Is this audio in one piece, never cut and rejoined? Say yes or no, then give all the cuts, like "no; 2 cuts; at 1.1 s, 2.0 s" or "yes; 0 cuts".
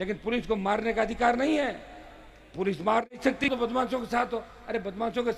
no; 1 cut; at 3.5 s